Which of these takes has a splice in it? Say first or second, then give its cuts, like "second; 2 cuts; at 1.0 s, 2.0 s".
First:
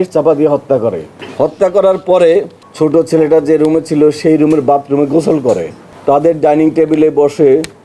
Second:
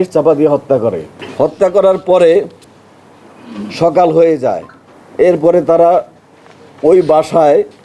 first; 2 cuts; at 2.6 s, 5.9 s